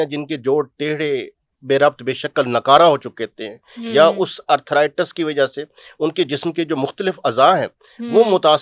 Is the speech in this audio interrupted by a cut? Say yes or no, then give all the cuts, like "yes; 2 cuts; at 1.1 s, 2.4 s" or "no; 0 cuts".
no; 0 cuts